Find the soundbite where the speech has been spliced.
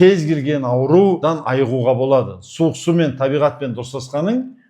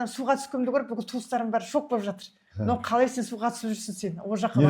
first; 1 cut; at 1.2 s

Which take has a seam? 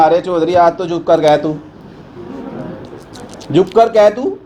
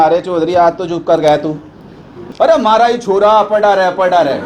second; 1 cut; at 2.3 s

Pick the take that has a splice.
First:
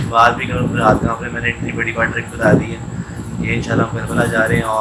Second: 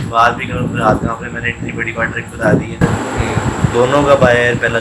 second; 1 cut; at 2.7 s

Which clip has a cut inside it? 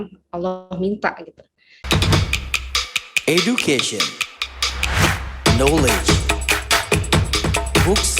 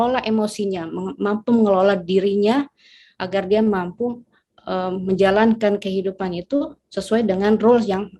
first; 1 cut; at 1.7 s

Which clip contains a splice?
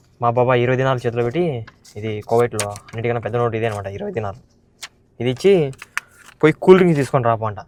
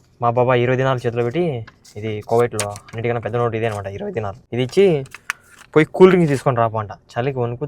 second; 1 cut; at 4.4 s

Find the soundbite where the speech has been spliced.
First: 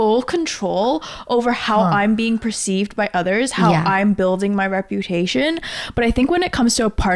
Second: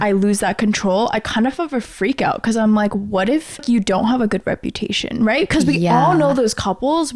second; 1 cut; at 3.6 s

